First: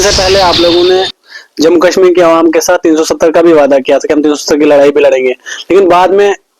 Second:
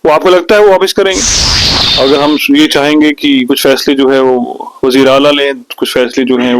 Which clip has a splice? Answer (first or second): second